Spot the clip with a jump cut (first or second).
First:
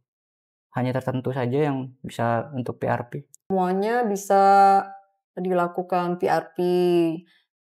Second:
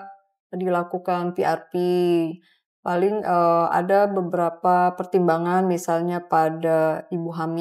first